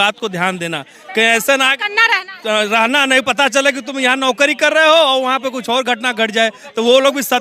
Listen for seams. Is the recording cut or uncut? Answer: uncut